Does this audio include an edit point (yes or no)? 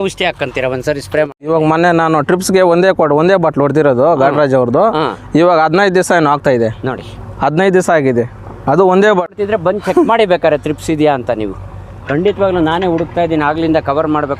yes